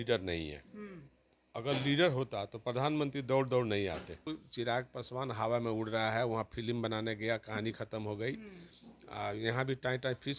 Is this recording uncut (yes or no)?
no